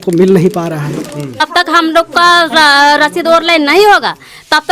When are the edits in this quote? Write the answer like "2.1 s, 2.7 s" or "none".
1.4 s